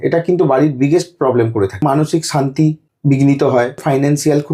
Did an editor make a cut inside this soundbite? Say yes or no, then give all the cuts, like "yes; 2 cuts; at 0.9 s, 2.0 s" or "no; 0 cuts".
yes; 3 cuts; at 1.8 s, 2.9 s, 3.8 s